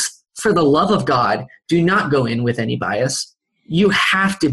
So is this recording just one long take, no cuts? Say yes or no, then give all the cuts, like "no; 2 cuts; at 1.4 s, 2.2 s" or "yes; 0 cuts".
yes; 0 cuts